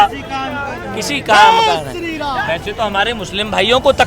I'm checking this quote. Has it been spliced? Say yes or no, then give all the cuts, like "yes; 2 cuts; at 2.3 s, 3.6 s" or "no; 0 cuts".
yes; 1 cut; at 2.3 s